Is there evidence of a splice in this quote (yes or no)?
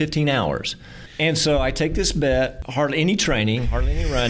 yes